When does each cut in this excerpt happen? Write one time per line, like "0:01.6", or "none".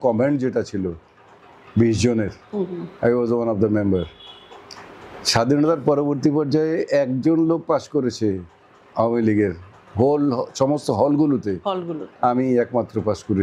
none